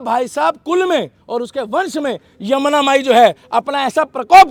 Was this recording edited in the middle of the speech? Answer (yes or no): no